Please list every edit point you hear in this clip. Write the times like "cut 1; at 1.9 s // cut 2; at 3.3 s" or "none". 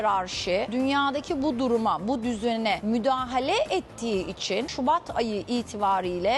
cut 1; at 4.7 s